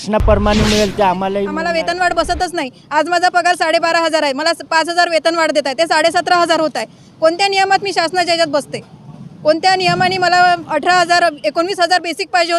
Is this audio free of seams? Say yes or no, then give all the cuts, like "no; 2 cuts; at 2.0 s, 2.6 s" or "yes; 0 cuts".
no; 1 cut; at 1.6 s